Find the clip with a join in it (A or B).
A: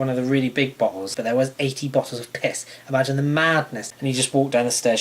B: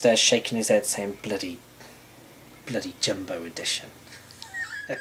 A